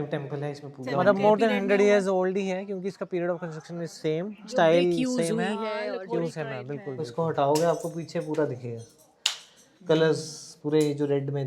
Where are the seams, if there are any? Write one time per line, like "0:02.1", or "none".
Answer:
0:00.9
0:07.0